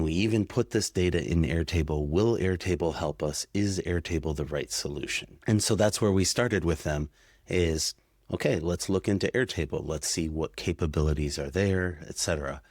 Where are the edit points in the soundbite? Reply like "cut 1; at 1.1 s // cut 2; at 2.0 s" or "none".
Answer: cut 1; at 5.2 s